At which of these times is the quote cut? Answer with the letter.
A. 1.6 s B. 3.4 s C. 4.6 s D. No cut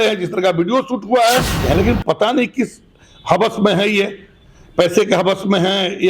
A